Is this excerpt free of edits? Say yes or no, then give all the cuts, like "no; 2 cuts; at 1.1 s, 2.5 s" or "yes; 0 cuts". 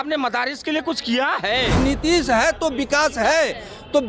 no; 1 cut; at 1.8 s